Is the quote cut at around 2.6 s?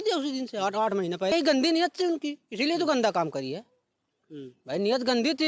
no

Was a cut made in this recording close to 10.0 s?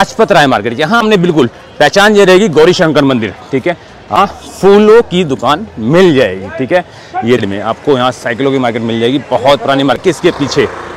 yes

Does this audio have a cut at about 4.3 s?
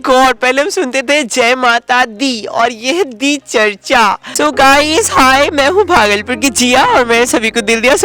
yes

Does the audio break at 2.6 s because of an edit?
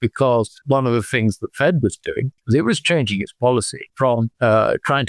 no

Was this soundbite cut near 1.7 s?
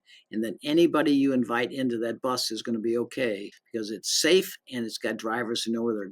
no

